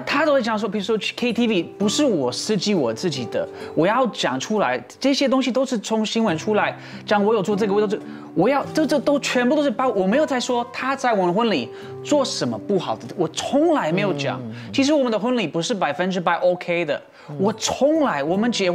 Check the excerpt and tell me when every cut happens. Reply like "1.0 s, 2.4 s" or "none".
none